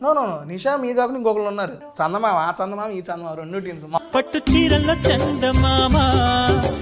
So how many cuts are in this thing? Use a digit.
2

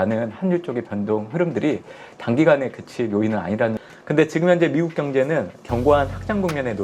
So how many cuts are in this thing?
1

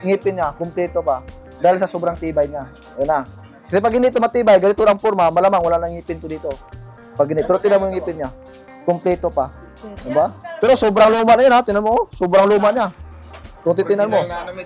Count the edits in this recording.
0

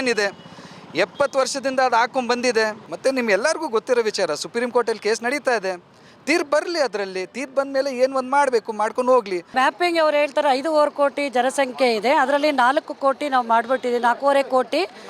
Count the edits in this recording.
2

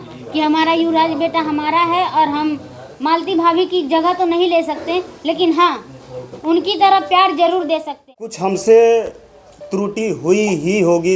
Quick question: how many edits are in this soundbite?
1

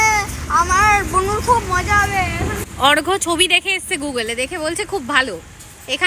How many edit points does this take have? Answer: 1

